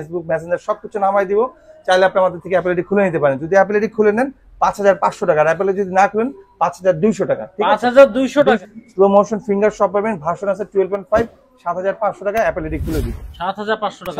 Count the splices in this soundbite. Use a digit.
1